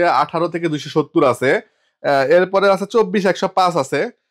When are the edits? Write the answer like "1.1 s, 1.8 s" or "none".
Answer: none